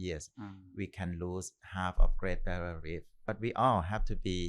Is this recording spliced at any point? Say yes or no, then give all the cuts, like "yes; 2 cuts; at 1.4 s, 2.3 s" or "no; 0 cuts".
yes; 1 cut; at 3.3 s